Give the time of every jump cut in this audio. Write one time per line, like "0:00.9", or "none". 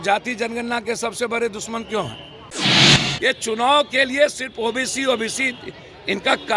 0:02.7